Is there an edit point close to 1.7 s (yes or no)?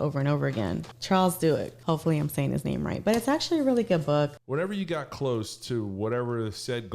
yes